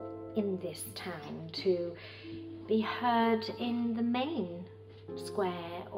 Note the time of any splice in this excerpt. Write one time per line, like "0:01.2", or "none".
none